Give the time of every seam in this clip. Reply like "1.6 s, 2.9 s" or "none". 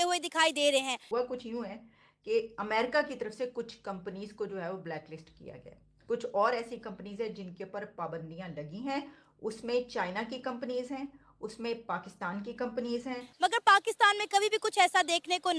1.0 s, 13.2 s